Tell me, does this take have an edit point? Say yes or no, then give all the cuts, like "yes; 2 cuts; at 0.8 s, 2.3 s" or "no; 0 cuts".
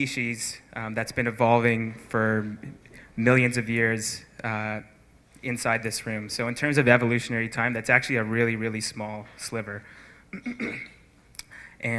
yes; 1 cut; at 4.9 s